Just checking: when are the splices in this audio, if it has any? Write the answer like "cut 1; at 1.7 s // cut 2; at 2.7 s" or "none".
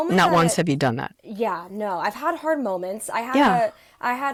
none